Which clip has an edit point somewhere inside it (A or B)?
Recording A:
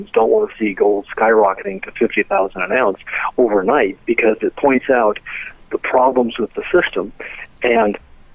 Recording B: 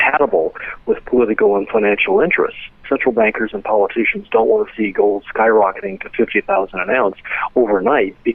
B